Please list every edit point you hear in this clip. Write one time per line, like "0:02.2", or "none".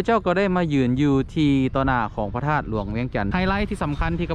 0:03.3